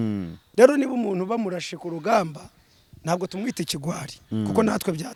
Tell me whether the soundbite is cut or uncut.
uncut